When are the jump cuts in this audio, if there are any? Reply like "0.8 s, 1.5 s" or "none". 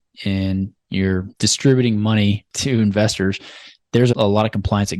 1.3 s, 2.5 s, 4.1 s